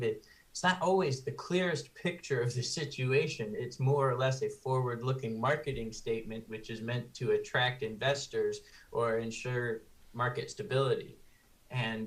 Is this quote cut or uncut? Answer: uncut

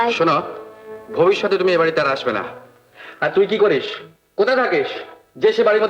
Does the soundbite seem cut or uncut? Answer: uncut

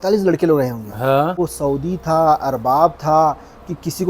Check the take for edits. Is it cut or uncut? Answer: cut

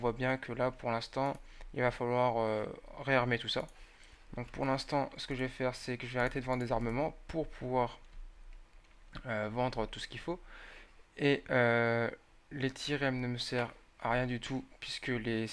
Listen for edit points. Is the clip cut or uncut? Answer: cut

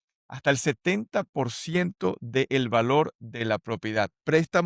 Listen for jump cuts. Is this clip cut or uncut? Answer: uncut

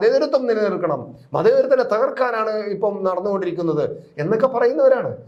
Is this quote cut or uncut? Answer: uncut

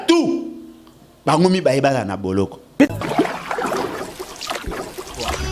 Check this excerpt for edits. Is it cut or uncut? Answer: cut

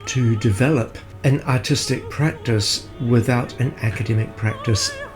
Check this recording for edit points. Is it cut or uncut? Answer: cut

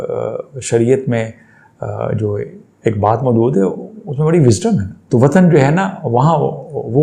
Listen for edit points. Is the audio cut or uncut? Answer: cut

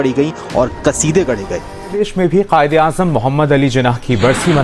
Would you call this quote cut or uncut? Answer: cut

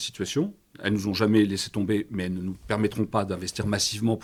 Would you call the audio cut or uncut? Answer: uncut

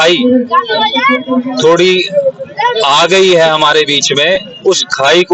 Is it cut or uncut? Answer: uncut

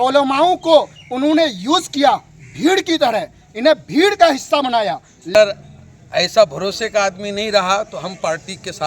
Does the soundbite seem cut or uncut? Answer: cut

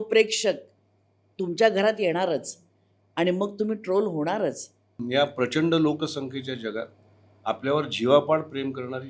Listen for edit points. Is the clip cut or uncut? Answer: cut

